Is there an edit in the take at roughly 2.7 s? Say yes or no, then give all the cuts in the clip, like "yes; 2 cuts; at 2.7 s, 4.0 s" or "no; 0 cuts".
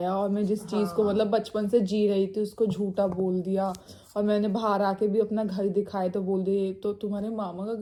no; 0 cuts